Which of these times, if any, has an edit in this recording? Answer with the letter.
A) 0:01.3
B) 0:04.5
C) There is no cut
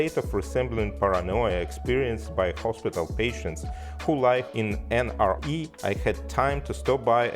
B